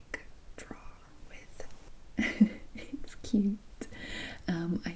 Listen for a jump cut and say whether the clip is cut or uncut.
cut